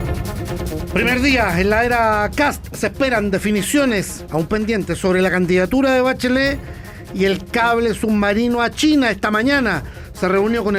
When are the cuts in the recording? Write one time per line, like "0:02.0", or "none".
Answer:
0:00.9